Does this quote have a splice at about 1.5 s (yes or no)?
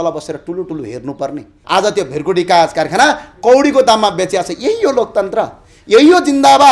yes